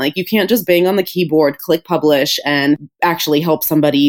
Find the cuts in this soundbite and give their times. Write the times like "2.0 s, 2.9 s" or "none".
2.9 s

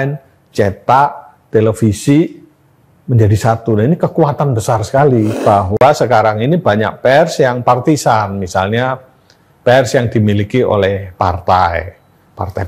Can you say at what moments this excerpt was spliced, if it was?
5.4 s

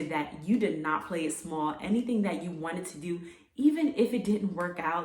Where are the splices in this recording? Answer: none

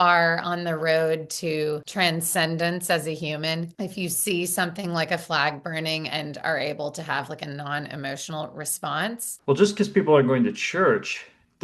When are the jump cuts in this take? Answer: 1.9 s, 3.7 s, 9.3 s

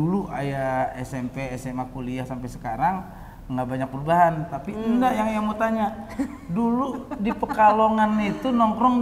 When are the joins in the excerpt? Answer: none

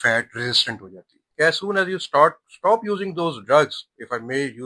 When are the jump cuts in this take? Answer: 1.2 s

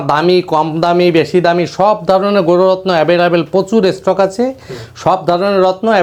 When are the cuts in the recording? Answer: none

